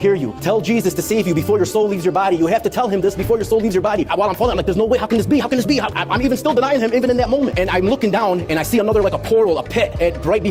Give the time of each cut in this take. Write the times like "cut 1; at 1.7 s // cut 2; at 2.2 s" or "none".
cut 1; at 4.1 s